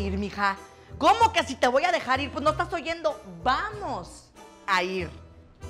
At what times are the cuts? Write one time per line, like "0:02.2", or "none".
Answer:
none